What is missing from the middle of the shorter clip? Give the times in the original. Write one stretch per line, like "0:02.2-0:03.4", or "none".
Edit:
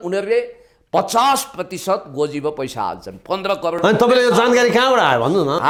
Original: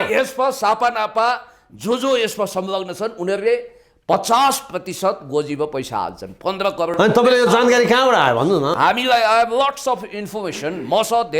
none